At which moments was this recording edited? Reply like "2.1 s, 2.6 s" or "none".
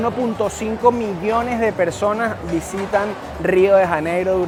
none

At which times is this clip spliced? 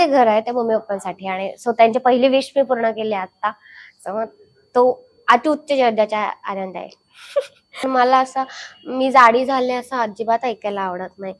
7.9 s

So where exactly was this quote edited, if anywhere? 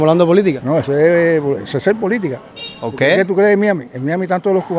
none

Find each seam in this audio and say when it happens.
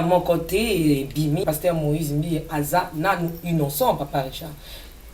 1.4 s

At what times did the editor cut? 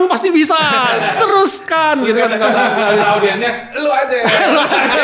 none

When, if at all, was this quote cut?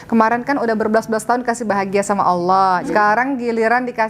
none

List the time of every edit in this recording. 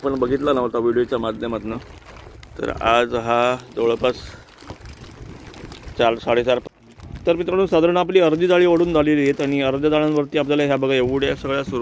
6.6 s

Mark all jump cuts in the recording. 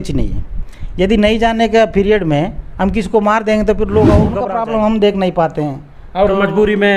4.4 s

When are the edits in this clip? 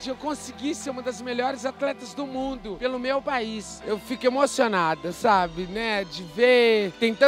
3.8 s

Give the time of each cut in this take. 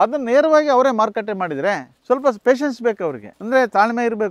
3.3 s

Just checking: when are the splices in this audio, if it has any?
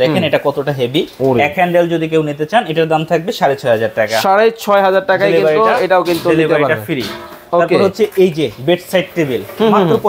none

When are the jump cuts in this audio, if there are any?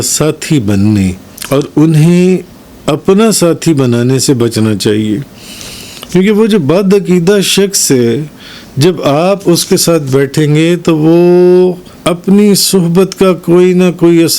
1.3 s, 11.9 s

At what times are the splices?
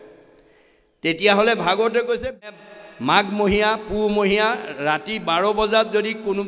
2.6 s

